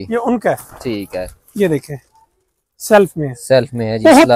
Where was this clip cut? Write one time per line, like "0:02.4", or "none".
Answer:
none